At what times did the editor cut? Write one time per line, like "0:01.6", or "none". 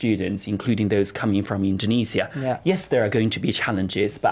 none